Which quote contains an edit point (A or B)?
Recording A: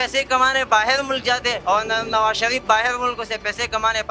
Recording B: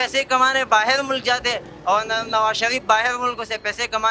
A